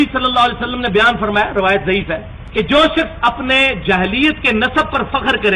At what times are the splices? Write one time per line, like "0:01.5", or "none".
0:02.4